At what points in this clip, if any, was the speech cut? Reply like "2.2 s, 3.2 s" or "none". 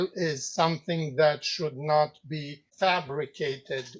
2.6 s